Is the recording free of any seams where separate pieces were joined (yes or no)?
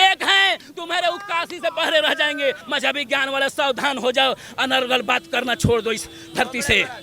no